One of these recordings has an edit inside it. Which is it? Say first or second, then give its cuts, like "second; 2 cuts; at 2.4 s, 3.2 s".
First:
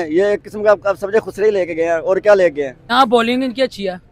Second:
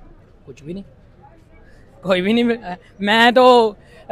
first; 1 cut; at 2.8 s